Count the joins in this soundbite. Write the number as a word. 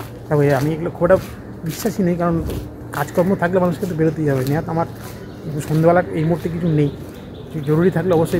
zero